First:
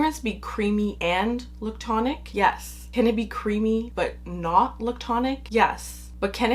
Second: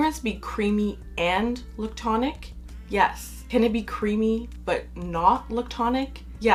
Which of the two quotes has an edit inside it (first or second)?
first